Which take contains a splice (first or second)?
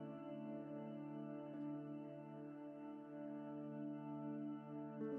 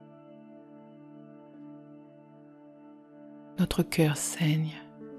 second